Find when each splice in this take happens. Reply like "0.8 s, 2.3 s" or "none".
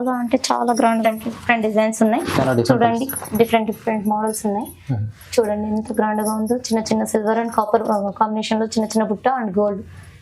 1.0 s